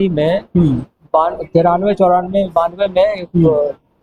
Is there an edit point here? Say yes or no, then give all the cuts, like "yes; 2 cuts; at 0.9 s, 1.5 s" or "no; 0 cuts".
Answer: no; 0 cuts